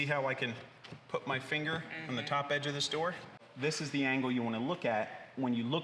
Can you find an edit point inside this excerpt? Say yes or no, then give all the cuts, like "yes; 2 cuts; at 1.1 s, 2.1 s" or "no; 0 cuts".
yes; 1 cut; at 3.4 s